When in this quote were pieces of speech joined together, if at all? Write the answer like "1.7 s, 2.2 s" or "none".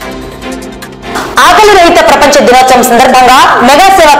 1.1 s